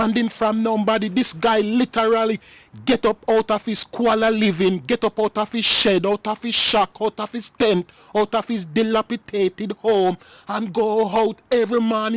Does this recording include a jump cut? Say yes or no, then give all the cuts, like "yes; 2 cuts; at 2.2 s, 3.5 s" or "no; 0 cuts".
no; 0 cuts